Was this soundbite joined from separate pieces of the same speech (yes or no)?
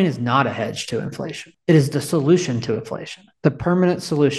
yes